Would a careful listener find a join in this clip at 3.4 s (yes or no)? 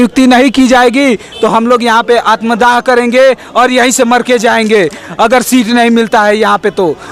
no